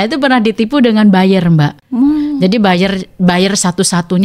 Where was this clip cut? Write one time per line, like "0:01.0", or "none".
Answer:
0:01.8